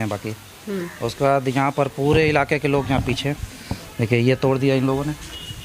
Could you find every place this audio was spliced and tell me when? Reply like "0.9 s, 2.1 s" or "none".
none